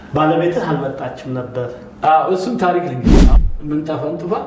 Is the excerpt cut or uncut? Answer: cut